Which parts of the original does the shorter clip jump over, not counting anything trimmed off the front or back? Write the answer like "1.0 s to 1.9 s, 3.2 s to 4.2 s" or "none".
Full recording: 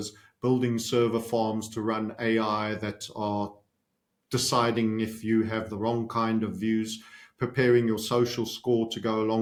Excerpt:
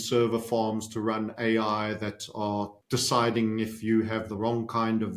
3.6 s to 4.2 s